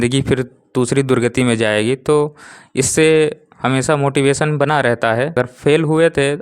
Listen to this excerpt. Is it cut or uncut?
cut